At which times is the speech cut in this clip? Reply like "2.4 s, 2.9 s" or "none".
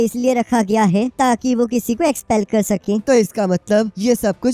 3.0 s